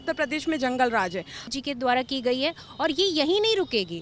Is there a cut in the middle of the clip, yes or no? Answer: yes